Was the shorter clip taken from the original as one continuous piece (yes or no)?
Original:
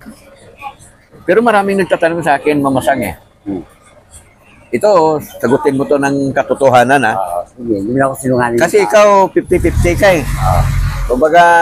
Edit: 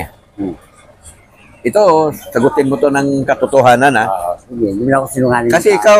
yes